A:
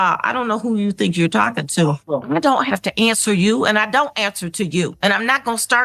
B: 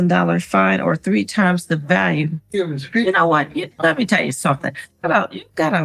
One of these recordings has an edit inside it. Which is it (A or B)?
A